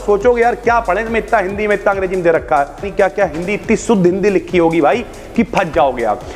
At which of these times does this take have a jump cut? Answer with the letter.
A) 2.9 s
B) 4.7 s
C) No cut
A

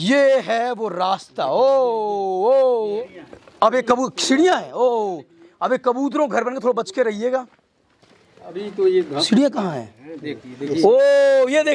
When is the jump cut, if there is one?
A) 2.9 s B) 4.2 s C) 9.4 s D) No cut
A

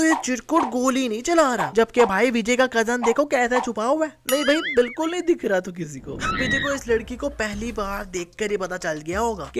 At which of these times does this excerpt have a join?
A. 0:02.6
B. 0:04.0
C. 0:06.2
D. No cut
C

